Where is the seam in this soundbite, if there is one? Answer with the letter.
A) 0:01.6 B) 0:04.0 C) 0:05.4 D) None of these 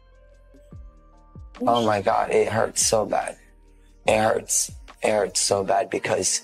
A